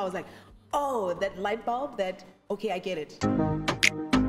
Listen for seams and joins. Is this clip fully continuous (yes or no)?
no